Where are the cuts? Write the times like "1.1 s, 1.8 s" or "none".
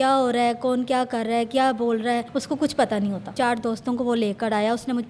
2.3 s, 3.3 s